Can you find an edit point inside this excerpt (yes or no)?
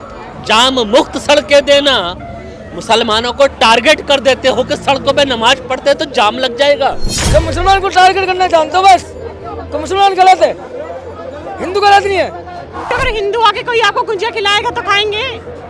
yes